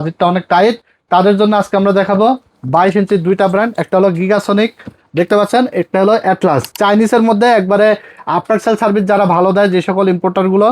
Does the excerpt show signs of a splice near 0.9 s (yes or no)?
yes